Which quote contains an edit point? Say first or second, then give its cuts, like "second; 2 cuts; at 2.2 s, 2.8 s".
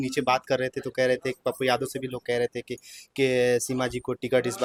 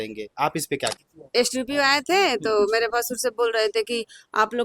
second; 1 cut; at 1.0 s